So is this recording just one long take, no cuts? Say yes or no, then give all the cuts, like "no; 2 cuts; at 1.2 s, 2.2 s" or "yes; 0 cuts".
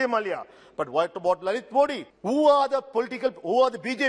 no; 1 cut; at 2.1 s